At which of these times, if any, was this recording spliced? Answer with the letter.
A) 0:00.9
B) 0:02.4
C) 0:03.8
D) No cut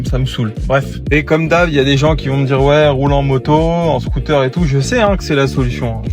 A